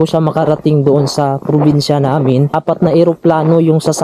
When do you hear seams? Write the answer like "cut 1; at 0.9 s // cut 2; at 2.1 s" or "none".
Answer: cut 1; at 2.5 s

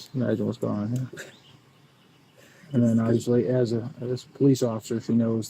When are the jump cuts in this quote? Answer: none

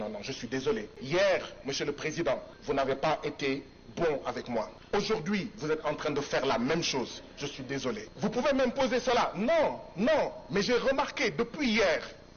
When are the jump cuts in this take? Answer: cut 1; at 0.9 s // cut 2; at 2.5 s // cut 3; at 4.8 s // cut 4; at 8.1 s

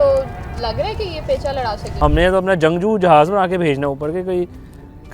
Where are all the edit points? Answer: cut 1; at 2.0 s

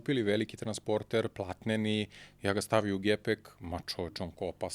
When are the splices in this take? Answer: none

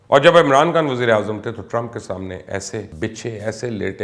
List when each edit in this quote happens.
cut 1; at 2.9 s

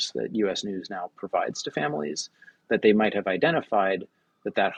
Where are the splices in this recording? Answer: none

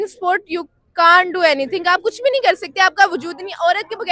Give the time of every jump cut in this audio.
none

